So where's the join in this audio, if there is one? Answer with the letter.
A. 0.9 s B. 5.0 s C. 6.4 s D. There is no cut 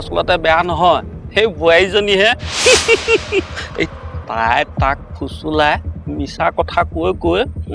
D